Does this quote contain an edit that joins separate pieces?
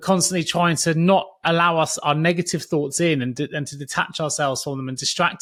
no; 0 cuts

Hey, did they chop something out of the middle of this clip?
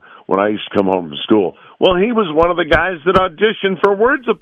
no; 0 cuts

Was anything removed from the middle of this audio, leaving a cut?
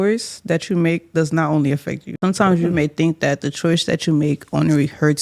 yes; 1 cut; at 2.1 s

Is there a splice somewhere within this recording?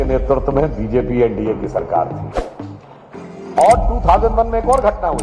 no; 0 cuts

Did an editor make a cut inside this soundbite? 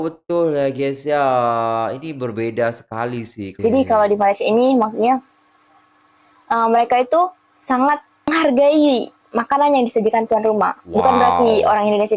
yes; 1 cut; at 3.4 s

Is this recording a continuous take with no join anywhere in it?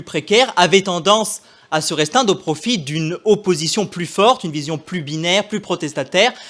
yes; 0 cuts

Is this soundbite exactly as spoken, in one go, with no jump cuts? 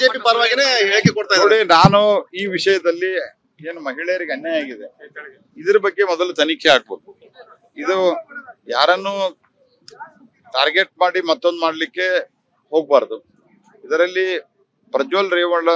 no; 1 cut; at 1.6 s

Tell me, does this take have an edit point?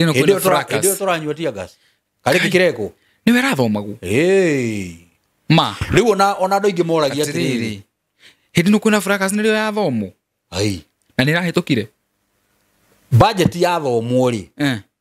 no; 0 cuts

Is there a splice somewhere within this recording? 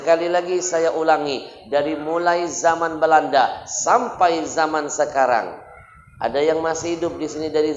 no; 0 cuts

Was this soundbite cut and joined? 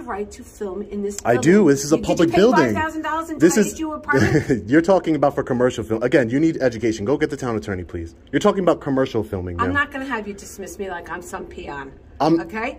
no; 0 cuts

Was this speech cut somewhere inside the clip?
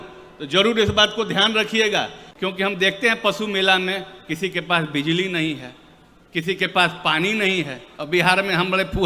yes; 2 cuts; at 2.2 s, 7.9 s

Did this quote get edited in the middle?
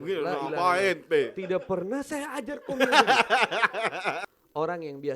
yes; 1 cut; at 4.2 s

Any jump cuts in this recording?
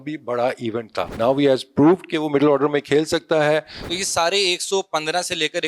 yes; 2 cuts; at 1.1 s, 3.9 s

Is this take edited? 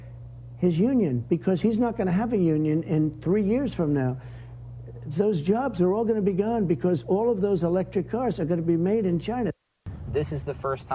yes; 1 cut; at 9.7 s

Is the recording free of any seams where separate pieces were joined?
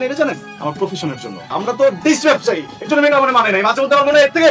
no; 1 cut; at 1.5 s

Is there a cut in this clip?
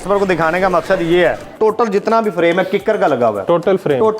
yes; 1 cut; at 1.5 s

